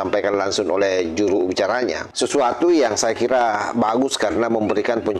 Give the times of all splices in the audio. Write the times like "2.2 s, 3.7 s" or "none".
2.0 s